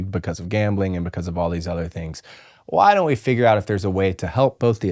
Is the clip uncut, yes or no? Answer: yes